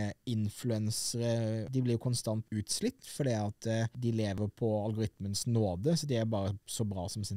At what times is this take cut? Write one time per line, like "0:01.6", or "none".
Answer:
0:01.7
0:02.5
0:04.4